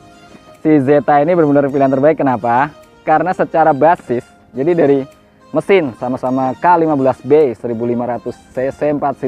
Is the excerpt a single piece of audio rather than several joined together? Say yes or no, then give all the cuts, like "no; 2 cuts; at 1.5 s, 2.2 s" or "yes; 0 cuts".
yes; 0 cuts